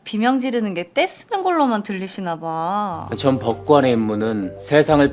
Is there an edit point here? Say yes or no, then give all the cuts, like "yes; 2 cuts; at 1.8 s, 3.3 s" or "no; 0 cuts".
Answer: yes; 1 cut; at 3.0 s